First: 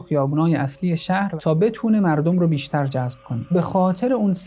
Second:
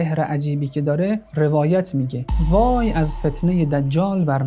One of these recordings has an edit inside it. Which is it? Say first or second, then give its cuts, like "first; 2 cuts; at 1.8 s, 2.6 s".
first; 2 cuts; at 1.3 s, 3.5 s